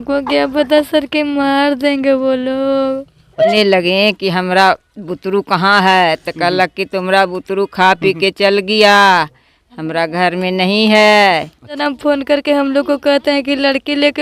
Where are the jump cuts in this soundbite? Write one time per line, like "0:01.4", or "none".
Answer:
0:03.5
0:11.8

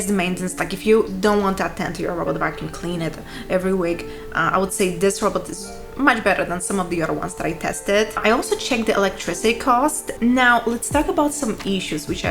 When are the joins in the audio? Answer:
0:10.1

